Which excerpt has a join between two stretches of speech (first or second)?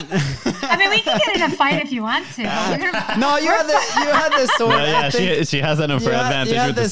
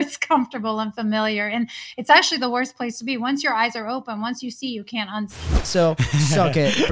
second